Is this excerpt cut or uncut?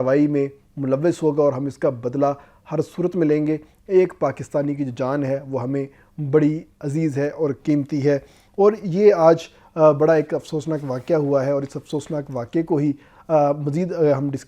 uncut